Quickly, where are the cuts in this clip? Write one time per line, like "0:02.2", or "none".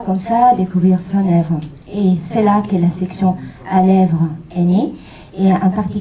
0:03.0